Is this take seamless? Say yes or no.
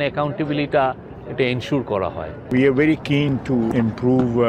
no